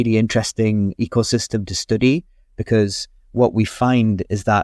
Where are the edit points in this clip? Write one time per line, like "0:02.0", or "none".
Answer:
0:00.9

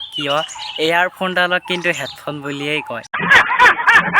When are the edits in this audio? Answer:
0:03.2

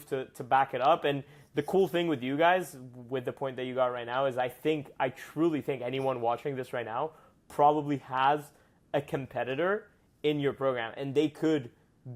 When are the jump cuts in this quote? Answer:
none

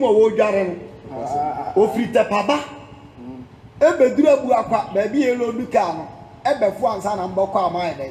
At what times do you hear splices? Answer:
none

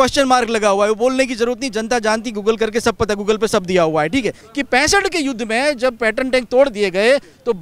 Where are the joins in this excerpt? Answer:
0:04.5

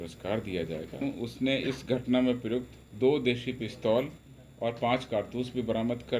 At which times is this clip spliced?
0:01.0

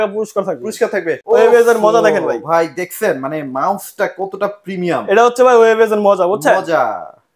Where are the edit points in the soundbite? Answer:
0:01.1

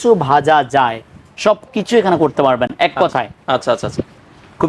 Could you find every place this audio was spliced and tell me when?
none

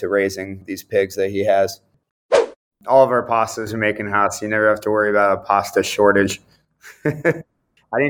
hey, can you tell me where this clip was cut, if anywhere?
0:02.5

